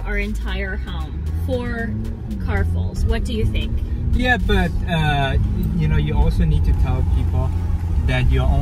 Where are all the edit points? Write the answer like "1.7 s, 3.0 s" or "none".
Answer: none